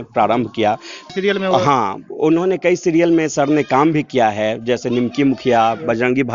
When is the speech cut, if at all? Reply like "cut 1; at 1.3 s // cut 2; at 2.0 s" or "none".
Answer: cut 1; at 1.1 s